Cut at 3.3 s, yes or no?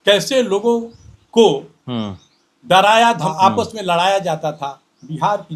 yes